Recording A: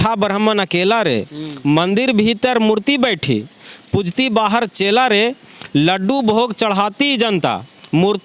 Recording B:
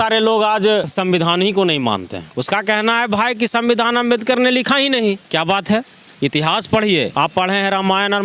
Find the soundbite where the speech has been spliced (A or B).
B